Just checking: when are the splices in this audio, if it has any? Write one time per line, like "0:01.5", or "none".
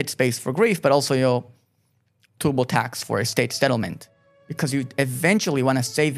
none